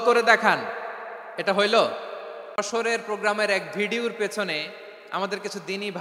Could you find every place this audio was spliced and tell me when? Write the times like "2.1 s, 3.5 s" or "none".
2.6 s